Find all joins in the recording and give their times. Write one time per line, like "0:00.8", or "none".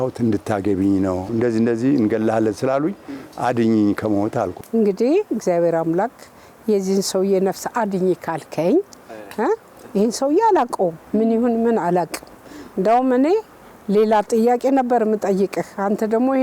0:01.2
0:04.6